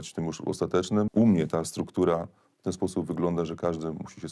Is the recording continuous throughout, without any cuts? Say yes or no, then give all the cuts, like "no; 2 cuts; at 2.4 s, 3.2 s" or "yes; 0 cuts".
no; 1 cut; at 1.1 s